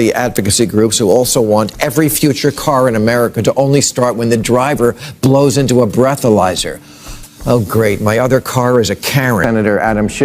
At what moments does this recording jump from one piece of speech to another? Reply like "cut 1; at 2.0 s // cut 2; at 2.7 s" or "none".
cut 1; at 9.2 s